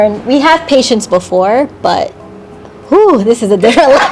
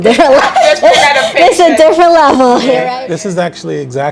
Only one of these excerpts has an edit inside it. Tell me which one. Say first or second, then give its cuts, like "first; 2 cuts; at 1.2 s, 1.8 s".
second; 1 cut; at 2.8 s